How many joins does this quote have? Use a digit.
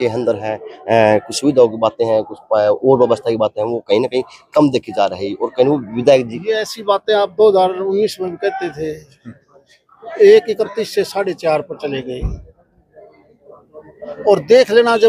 0